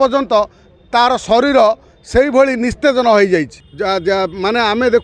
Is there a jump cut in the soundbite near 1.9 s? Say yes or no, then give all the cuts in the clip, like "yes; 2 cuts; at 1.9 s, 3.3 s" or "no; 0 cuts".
no; 1 cut; at 3.6 s